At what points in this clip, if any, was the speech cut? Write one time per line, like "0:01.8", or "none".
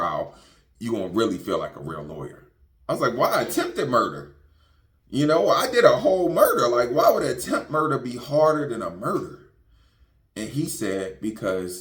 none